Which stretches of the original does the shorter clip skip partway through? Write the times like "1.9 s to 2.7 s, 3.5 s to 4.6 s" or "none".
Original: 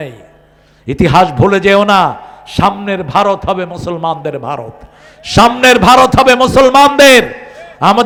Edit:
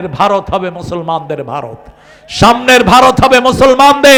none